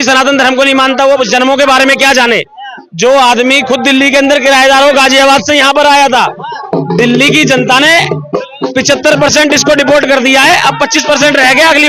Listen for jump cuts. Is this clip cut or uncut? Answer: uncut